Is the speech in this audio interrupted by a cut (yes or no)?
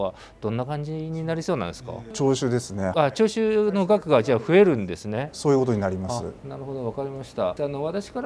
no